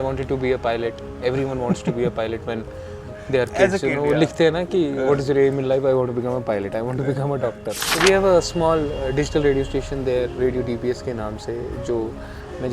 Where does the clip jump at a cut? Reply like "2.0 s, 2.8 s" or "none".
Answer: 7.8 s